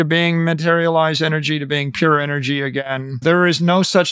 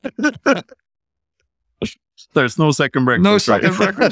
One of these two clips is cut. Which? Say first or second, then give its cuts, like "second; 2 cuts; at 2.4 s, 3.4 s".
first; 1 cut; at 3.2 s